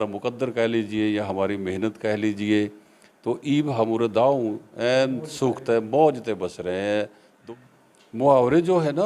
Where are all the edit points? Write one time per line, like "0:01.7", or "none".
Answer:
0:07.3